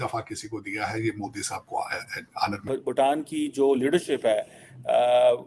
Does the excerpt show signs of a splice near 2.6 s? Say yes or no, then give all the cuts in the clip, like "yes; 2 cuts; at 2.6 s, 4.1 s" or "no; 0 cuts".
yes; 1 cut; at 2.6 s